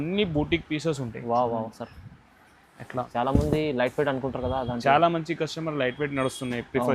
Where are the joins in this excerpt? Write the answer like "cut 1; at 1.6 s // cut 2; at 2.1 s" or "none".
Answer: cut 1; at 3.1 s